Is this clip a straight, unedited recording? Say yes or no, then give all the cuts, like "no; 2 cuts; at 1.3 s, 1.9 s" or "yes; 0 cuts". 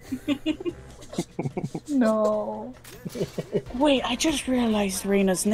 yes; 0 cuts